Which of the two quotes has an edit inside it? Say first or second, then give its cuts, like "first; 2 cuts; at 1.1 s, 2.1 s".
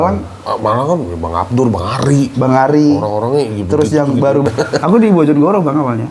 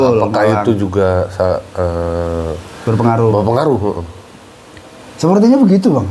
first; 1 cut; at 4.4 s